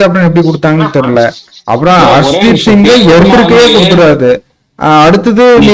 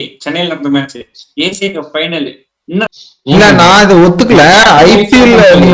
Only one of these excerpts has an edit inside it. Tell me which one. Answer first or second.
second